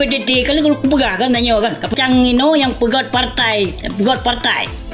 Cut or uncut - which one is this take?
cut